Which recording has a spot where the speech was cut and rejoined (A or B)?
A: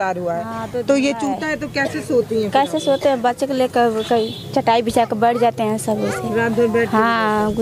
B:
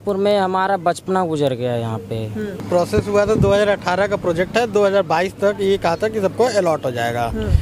B